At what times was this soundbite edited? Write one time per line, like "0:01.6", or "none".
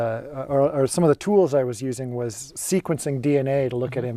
0:02.5